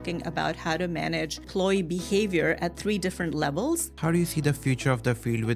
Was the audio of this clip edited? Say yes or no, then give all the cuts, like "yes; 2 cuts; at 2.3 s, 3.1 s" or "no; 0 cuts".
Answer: yes; 2 cuts; at 1.5 s, 3.9 s